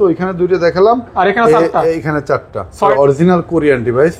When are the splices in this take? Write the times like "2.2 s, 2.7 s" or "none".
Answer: 2.9 s

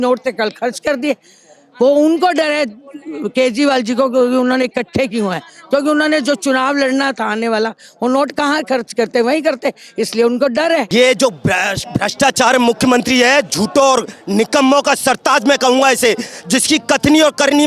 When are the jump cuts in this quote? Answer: 10.9 s

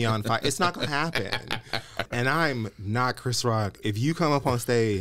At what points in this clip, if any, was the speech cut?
2.1 s

